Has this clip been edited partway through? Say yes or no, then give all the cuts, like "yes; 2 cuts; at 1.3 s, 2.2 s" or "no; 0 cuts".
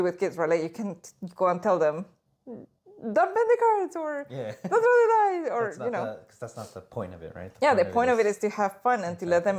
no; 0 cuts